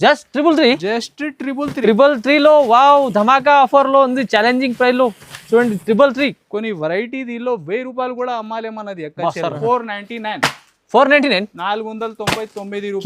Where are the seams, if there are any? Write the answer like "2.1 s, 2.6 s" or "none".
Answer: 9.6 s